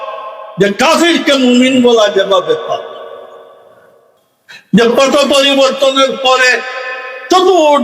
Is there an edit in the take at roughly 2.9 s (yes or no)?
no